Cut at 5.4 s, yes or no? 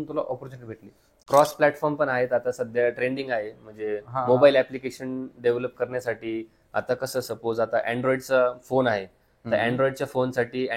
no